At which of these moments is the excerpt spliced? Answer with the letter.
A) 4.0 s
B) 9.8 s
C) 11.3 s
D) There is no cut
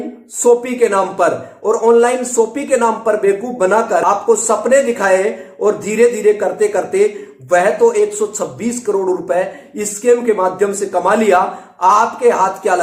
A